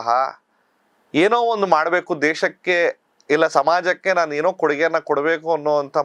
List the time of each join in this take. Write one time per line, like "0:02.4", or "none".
none